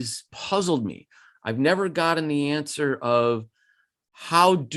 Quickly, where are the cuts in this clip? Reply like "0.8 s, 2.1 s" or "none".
none